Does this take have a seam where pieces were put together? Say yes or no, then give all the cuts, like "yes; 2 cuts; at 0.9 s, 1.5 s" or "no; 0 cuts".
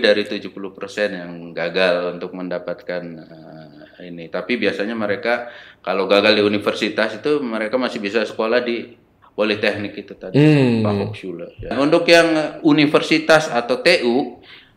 yes; 1 cut; at 11.7 s